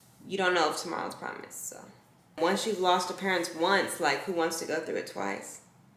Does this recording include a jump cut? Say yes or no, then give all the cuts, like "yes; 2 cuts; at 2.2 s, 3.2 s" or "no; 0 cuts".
yes; 1 cut; at 2.4 s